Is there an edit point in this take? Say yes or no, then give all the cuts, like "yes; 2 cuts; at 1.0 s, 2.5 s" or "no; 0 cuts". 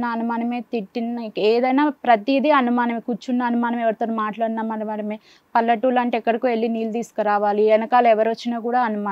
no; 0 cuts